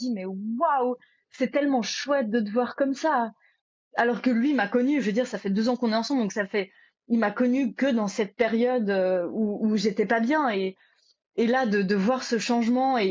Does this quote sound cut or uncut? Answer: uncut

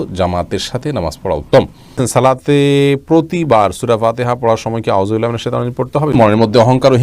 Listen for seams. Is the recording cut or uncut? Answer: cut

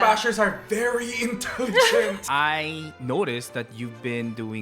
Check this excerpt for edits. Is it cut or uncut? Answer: cut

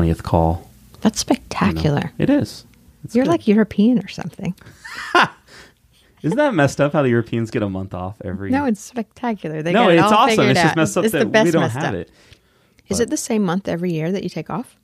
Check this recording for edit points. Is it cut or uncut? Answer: uncut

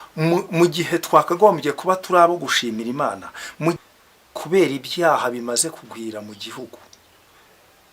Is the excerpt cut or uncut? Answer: cut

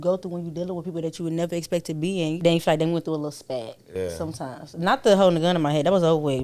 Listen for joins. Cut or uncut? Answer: cut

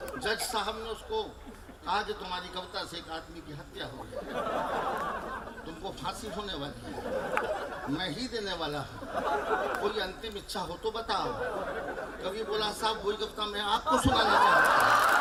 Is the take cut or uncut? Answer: uncut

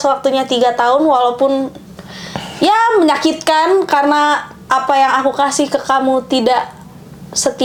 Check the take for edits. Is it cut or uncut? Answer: uncut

